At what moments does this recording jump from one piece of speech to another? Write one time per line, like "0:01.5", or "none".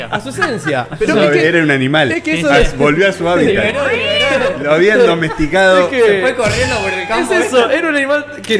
none